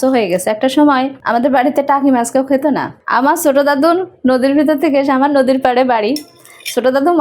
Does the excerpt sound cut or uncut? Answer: cut